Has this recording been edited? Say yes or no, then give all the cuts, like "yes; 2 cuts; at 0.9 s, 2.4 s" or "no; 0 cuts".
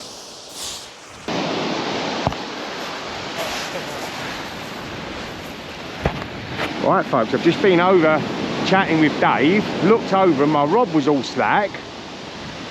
yes; 1 cut; at 1.3 s